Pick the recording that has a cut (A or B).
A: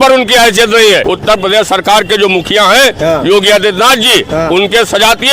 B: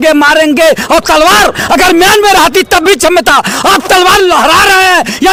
A